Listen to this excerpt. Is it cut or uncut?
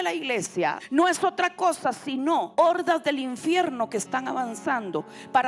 cut